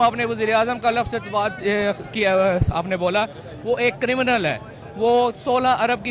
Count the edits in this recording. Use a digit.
0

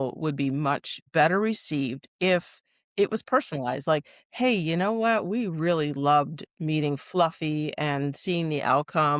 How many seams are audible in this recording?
1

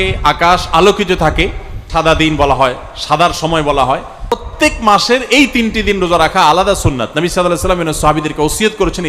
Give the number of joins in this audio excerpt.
2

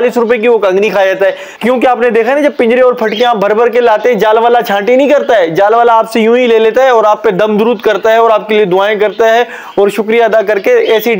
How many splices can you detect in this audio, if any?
1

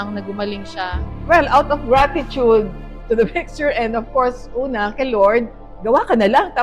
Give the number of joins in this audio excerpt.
2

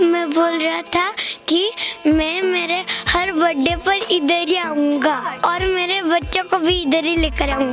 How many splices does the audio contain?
1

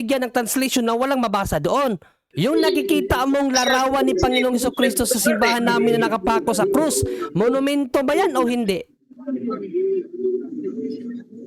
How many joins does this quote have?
1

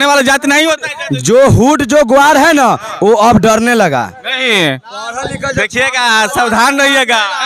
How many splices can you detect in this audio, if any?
0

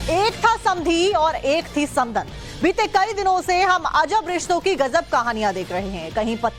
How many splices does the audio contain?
1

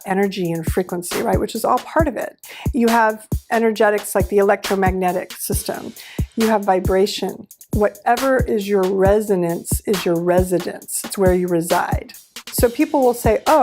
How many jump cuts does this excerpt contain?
2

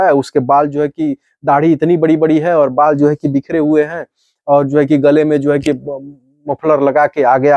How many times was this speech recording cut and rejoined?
0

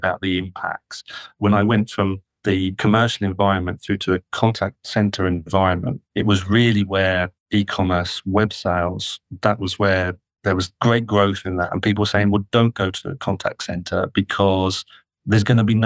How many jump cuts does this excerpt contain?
5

